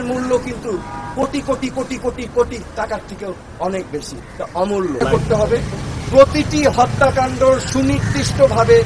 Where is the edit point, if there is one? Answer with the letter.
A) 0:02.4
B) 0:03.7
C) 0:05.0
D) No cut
C